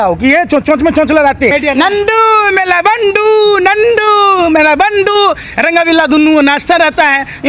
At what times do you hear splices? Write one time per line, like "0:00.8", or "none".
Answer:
0:01.5

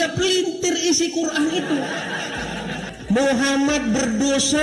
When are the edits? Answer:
0:02.9

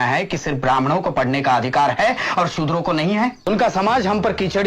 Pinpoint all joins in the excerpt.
0:03.5

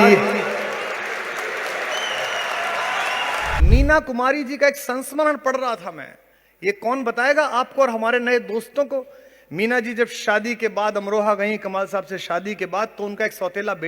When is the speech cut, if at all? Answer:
0:03.5

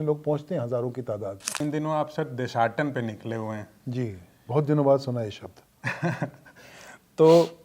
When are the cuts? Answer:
0:01.6

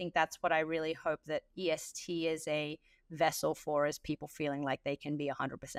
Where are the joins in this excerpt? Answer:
none

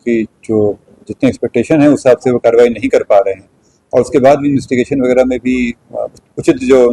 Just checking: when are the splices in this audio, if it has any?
none

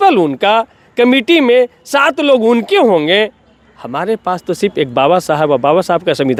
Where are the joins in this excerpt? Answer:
none

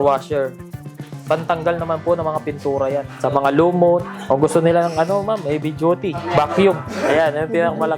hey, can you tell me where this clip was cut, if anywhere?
0:04.1
0:06.3

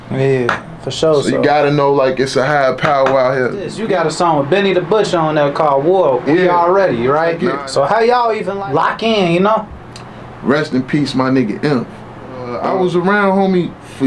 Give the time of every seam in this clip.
0:03.7
0:07.4
0:08.5
0:12.5

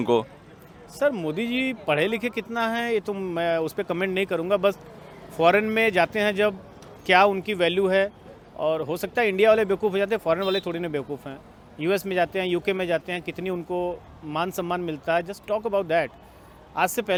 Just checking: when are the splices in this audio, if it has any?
none

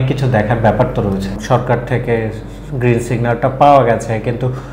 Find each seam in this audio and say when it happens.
0:01.4

